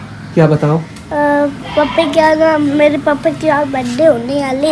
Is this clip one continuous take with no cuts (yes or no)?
yes